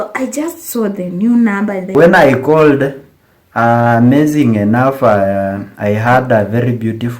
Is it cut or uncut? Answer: cut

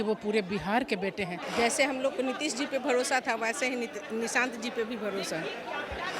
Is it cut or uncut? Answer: cut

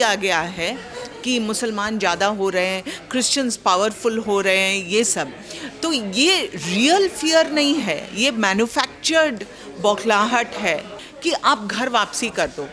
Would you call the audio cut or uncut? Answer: cut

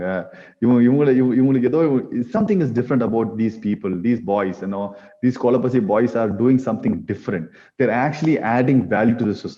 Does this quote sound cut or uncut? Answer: uncut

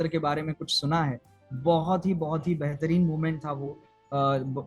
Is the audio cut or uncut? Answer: uncut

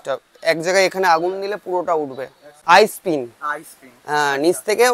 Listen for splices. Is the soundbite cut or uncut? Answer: cut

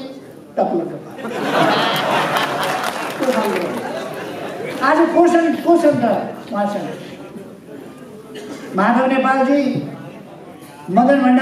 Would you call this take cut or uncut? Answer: uncut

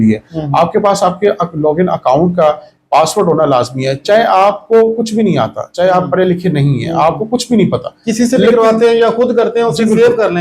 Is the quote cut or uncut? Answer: uncut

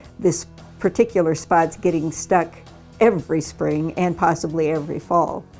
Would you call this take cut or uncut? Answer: uncut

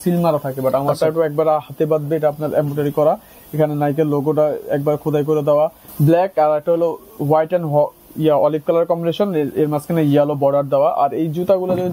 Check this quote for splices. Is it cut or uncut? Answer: cut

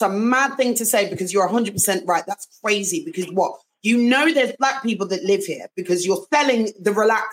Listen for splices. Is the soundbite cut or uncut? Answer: uncut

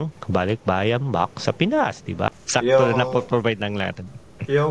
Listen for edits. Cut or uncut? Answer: cut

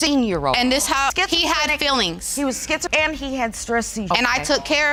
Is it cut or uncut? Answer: uncut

